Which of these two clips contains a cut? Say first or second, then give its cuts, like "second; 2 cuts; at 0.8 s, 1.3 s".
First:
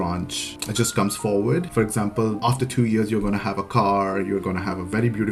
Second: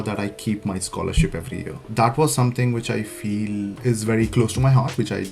second; 1 cut; at 1.8 s